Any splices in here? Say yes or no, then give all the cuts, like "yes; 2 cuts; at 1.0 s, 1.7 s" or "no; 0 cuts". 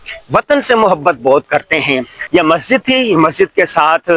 yes; 1 cut; at 2.1 s